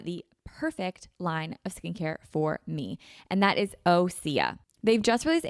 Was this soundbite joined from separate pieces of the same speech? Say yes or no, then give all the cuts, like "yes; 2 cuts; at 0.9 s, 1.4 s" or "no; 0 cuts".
yes; 1 cut; at 4.6 s